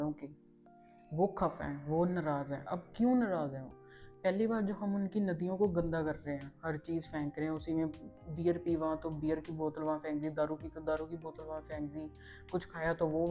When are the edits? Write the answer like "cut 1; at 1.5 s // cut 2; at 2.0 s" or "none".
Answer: none